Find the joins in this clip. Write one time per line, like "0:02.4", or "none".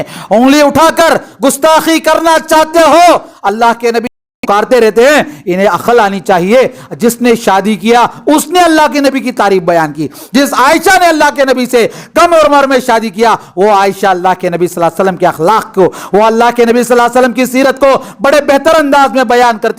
0:04.3

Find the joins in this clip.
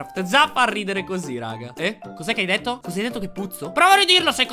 0:01.7
0:03.6

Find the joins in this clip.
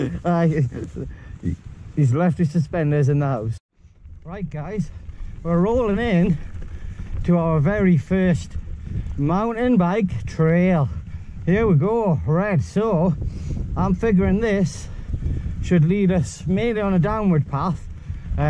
0:03.7

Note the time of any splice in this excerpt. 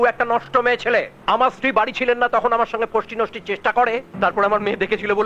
0:01.1
0:04.1

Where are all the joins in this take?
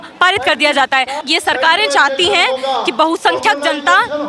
0:01.2

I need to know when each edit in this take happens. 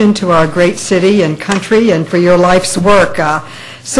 0:01.5

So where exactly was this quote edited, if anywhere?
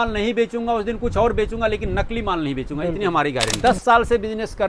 0:03.5

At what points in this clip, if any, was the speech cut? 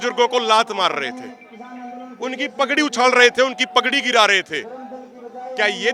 none

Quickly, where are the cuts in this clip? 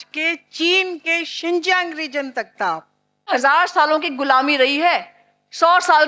0:03.3

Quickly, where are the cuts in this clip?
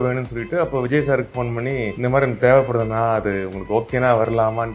0:01.9

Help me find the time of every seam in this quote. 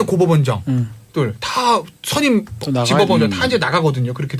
0:01.8

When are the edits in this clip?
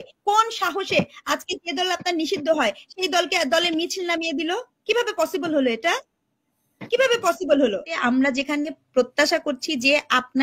0:07.9

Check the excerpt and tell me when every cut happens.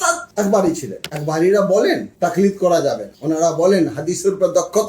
0:01.0

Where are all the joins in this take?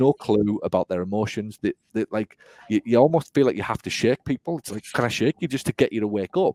none

